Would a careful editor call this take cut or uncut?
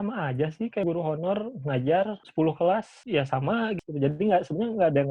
cut